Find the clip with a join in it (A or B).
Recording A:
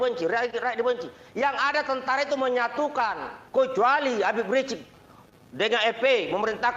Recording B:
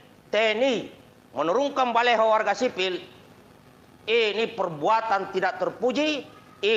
A